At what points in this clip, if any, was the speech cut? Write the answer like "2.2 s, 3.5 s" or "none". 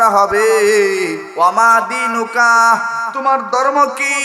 1.2 s